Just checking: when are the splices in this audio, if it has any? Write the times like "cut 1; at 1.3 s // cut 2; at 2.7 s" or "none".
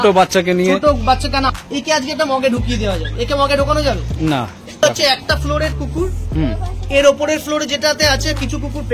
cut 1; at 1.5 s // cut 2; at 4.8 s